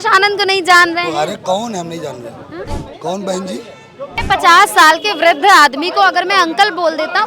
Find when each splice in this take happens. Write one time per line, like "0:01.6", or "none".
0:02.7
0:04.2

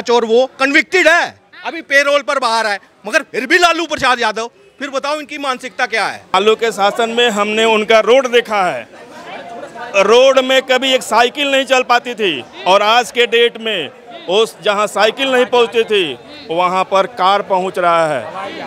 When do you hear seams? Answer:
0:06.3

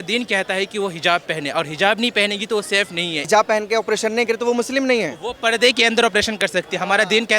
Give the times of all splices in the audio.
0:03.3

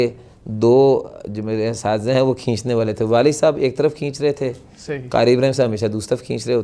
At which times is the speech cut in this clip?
none

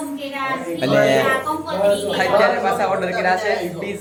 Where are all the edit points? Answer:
none

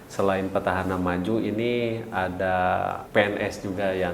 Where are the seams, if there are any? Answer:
0:03.0

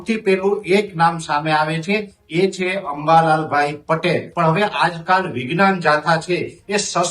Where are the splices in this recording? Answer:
0:04.3

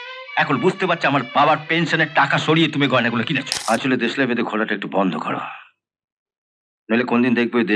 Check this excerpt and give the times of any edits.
0:03.5

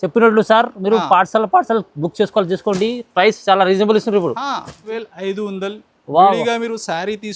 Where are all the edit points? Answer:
0:04.9

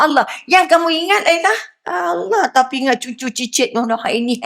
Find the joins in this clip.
0:01.7

